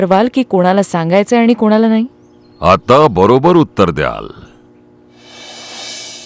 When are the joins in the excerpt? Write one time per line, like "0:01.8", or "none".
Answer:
0:05.3